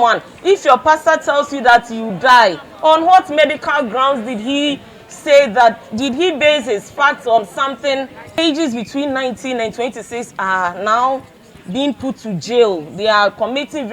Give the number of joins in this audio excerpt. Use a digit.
1